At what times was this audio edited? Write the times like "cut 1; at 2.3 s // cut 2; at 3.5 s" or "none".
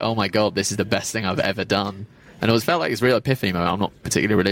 none